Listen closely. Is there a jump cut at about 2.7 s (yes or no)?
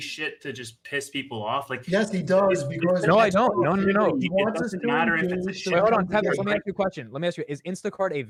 no